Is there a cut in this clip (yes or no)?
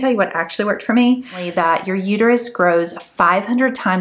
yes